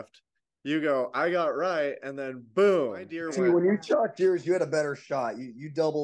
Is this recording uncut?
no; 1 cut; at 3.2 s

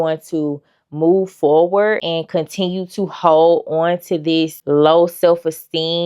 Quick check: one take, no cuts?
no; 1 cut; at 2.0 s

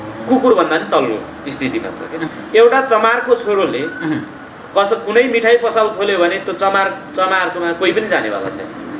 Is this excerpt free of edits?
no; 1 cut; at 2.3 s

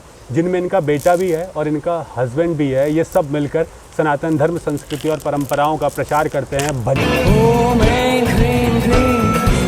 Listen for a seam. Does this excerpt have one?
yes; 1 cut; at 7.0 s

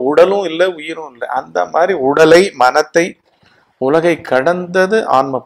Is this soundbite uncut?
yes; 0 cuts

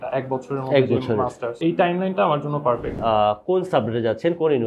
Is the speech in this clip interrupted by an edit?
yes; 2 cuts; at 1.6 s, 3.0 s

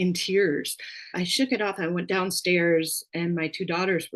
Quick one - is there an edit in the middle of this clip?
no; 0 cuts

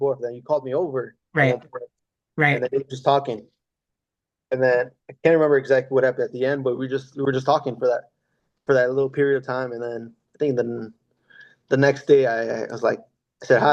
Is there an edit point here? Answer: no; 0 cuts

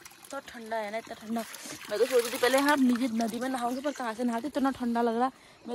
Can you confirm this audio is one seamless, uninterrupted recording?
yes; 0 cuts

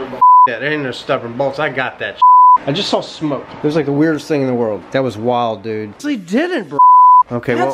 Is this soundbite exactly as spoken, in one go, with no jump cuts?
no; 3 cuts; at 2.6 s, 4.8 s, 5.9 s

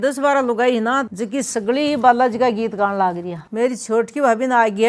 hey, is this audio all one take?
yes; 0 cuts

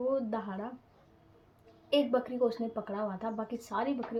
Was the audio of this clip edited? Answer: no; 0 cuts

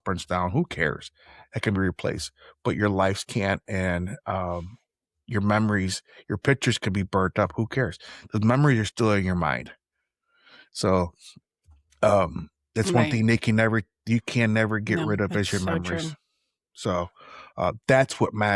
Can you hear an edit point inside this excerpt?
no; 0 cuts

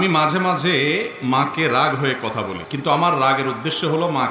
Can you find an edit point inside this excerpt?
yes; 1 cut; at 2.6 s

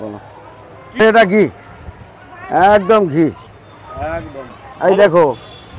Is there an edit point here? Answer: yes; 2 cuts; at 1.0 s, 4.6 s

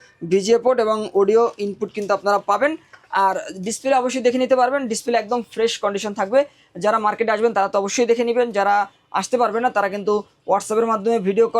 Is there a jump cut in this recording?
no; 0 cuts

